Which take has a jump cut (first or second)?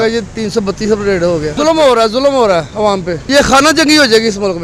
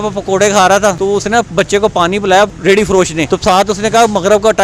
second